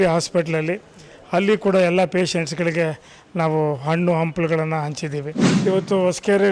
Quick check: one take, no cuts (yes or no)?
no